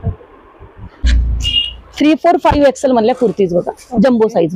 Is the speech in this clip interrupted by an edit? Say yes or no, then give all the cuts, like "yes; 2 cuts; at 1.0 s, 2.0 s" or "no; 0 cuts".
yes; 1 cut; at 1.0 s